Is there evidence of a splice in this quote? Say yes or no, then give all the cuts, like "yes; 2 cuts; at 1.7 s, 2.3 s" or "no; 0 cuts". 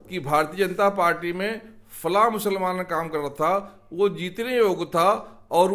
no; 0 cuts